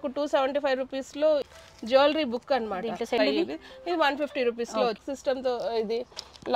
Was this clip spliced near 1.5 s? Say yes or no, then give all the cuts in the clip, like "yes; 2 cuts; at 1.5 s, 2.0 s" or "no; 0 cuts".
yes; 3 cuts; at 1.5 s, 3.2 s, 5.0 s